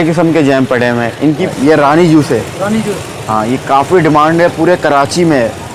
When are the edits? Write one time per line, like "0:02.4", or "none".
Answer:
0:01.5